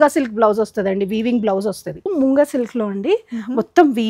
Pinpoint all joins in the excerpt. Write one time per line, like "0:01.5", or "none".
0:02.1